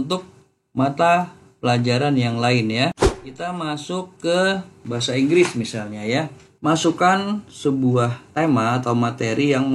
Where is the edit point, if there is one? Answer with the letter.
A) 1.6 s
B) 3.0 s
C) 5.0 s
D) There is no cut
B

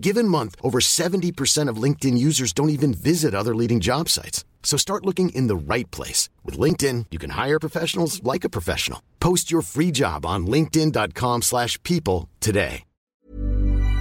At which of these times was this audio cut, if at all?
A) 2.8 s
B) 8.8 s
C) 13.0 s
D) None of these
C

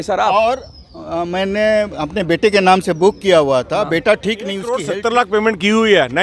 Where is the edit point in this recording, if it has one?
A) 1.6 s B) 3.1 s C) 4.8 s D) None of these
C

